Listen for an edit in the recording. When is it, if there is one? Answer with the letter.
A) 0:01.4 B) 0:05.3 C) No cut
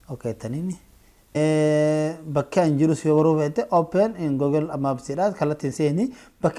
A